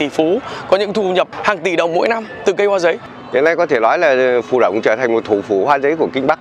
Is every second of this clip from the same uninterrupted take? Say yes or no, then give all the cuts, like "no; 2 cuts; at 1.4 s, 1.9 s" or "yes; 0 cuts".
no; 2 cuts; at 1.3 s, 3.1 s